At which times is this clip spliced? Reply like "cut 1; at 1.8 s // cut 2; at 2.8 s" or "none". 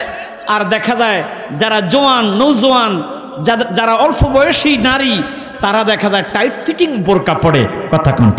none